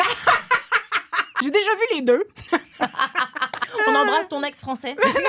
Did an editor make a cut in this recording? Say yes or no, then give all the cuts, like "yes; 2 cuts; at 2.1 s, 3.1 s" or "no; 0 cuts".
yes; 2 cuts; at 1.3 s, 3.6 s